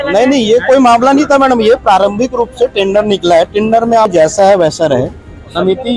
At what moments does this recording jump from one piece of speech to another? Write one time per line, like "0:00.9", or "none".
0:04.1